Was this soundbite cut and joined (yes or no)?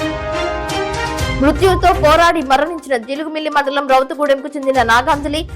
yes